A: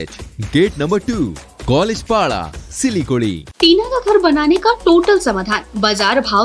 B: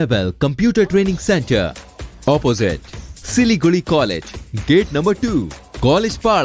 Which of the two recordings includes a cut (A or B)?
A